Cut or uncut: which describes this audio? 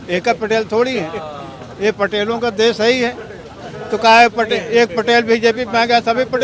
uncut